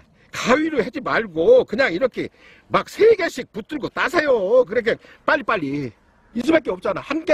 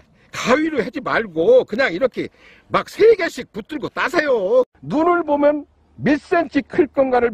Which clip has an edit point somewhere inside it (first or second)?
second